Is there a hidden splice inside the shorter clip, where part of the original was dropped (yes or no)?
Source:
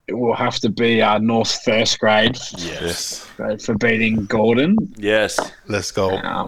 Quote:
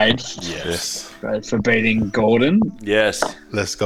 no